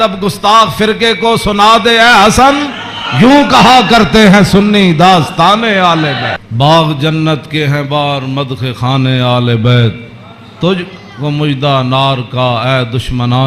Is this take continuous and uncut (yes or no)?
no